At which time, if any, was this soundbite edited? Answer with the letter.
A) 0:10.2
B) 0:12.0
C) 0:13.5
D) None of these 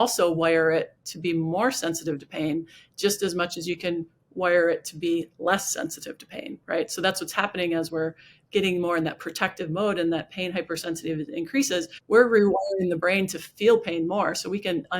B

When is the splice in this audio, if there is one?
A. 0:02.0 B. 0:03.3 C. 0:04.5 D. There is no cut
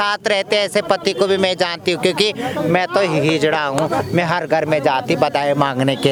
D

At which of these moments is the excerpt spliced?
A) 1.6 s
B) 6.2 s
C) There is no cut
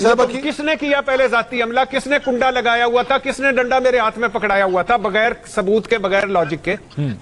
C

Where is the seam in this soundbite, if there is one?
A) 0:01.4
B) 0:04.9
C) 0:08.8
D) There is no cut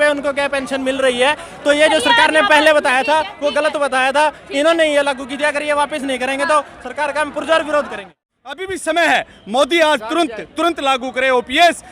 C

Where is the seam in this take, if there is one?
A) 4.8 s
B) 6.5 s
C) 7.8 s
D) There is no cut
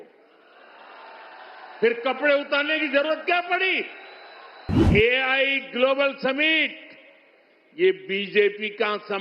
A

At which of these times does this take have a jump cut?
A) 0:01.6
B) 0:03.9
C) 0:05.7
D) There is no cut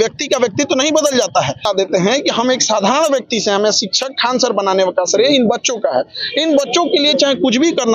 A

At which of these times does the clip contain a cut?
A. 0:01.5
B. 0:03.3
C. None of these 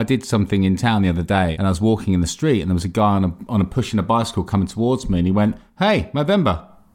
A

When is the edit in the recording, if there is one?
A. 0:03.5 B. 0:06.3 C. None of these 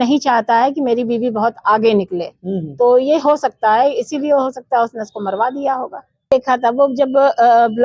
B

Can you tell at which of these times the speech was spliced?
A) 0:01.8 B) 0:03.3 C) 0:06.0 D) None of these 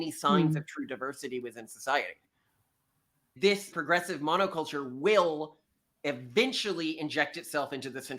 B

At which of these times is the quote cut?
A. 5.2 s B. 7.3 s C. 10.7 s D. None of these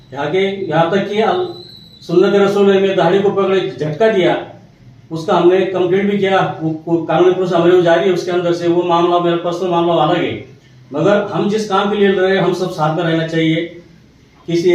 D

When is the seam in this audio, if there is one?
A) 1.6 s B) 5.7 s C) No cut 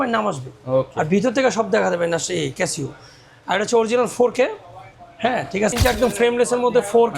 B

